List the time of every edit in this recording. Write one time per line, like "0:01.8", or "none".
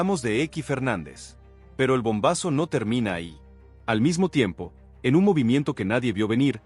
0:01.8